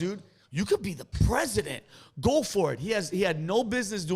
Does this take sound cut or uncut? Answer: cut